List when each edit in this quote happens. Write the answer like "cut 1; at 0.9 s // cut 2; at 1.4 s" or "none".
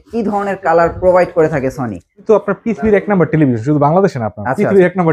cut 1; at 2.2 s